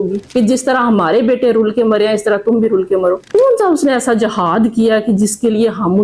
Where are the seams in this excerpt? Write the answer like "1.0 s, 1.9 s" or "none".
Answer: none